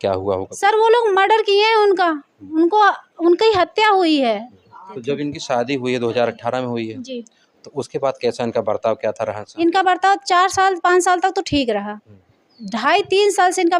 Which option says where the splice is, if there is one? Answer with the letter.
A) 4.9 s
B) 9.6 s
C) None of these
A